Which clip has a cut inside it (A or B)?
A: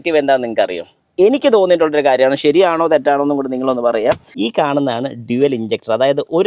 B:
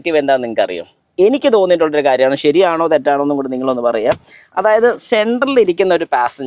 A